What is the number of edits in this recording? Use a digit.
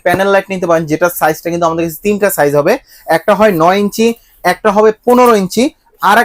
0